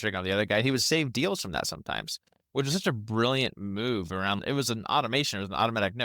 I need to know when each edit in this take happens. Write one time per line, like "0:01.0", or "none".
0:04.4